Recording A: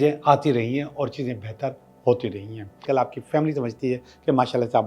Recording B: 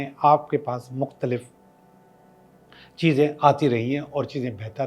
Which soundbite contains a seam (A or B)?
A